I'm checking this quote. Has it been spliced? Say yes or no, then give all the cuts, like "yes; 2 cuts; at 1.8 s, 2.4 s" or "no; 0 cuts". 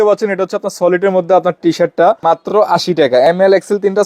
yes; 1 cut; at 2.2 s